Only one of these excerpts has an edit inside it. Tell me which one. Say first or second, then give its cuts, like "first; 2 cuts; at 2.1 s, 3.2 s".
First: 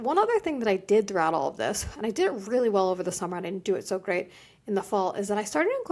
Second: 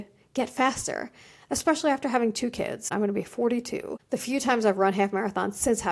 second; 2 cuts; at 2.9 s, 3.9 s